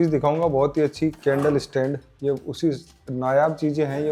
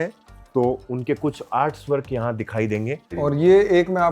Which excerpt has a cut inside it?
second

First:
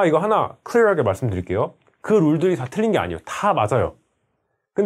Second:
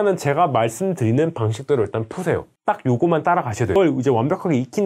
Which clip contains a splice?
second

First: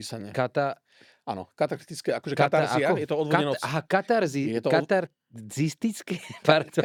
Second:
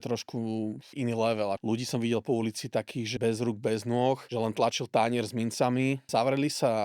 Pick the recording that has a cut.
second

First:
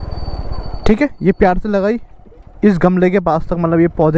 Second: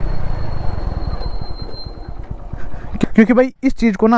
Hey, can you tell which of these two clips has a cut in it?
second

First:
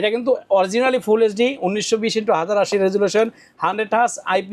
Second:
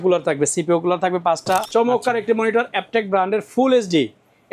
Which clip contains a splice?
second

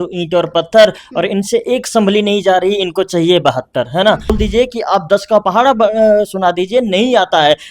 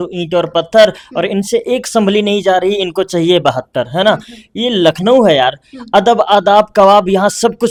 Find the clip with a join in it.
first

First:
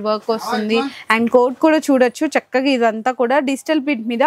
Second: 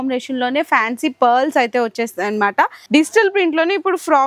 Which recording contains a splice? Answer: second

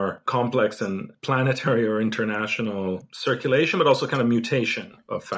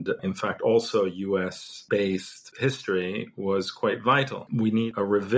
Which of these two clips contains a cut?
second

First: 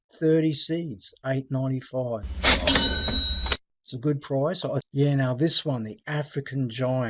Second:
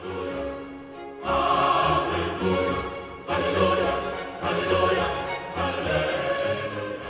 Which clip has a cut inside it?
first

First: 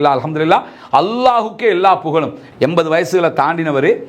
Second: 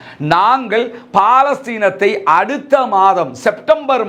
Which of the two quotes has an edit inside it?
first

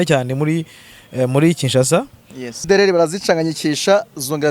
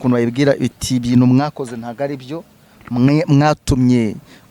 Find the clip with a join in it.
first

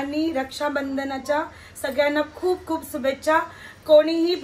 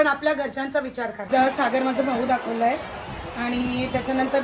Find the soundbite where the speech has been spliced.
second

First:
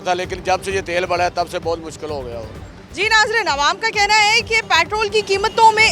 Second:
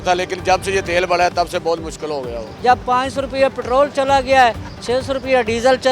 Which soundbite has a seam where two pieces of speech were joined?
second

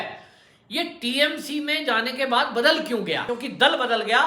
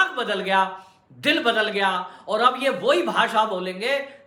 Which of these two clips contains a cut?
first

